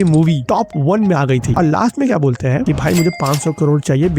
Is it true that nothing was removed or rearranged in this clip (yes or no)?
no